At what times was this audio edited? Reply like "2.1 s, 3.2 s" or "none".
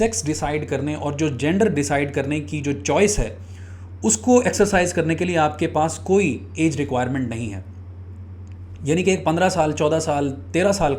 none